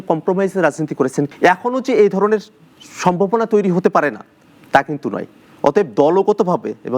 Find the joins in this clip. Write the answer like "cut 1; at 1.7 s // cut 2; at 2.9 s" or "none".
cut 1; at 1.3 s